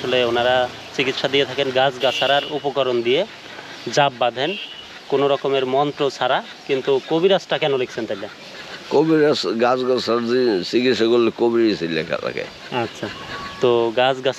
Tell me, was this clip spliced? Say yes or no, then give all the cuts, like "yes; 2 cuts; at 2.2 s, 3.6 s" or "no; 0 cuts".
no; 0 cuts